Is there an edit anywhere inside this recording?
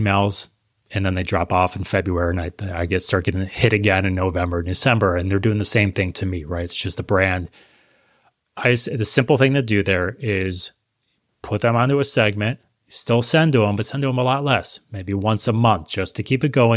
no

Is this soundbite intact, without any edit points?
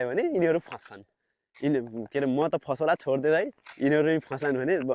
yes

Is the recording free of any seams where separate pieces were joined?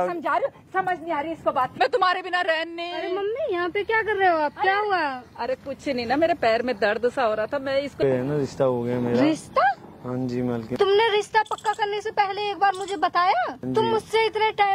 no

